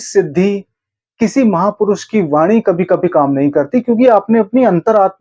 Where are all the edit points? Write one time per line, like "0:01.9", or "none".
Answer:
none